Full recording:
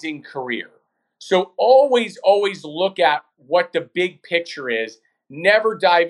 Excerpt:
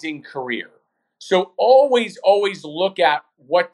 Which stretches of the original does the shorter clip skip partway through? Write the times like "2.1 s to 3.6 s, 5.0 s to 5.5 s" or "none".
none